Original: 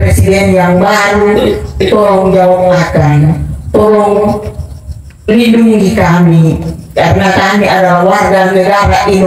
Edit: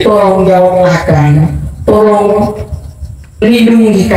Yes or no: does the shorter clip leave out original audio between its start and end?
no